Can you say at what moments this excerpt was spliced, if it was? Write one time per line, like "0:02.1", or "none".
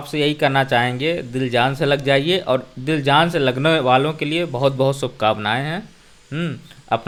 none